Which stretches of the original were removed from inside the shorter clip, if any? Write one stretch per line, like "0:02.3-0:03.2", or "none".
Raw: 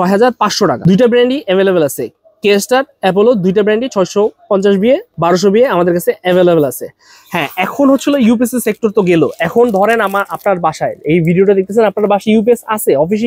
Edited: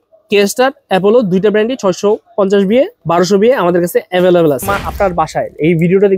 0:06.9-0:10.2